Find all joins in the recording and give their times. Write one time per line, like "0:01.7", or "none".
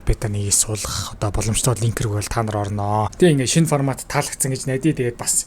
0:03.1